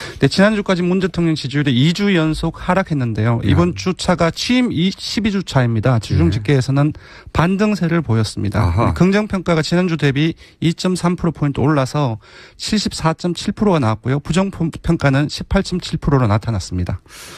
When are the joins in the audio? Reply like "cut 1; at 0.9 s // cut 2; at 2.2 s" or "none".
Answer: none